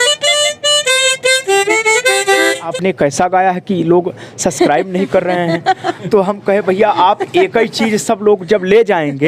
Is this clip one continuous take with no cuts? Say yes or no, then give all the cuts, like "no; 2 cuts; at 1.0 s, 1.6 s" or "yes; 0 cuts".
no; 1 cut; at 2.7 s